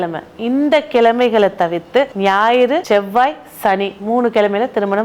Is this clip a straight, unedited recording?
no; 2 cuts; at 2.1 s, 2.8 s

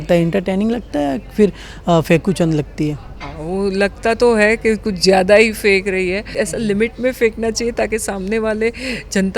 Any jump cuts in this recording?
yes; 1 cut; at 6.3 s

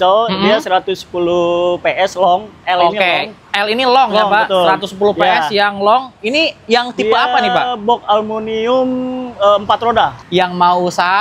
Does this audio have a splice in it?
yes; 1 cut; at 10.2 s

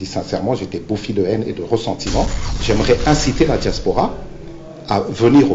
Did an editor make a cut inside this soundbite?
yes; 1 cut; at 2.5 s

